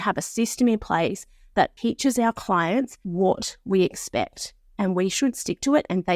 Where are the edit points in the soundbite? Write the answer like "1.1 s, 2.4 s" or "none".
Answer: 3.0 s